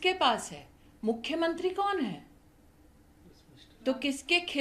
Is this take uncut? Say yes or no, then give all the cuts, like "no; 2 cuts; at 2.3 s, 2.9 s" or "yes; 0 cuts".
yes; 0 cuts